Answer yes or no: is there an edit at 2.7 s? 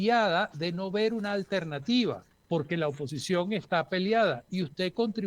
yes